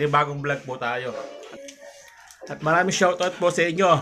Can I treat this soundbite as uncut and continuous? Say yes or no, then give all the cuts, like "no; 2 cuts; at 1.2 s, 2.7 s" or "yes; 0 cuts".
no; 1 cut; at 1.4 s